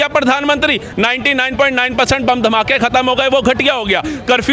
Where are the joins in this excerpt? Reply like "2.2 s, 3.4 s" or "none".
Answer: none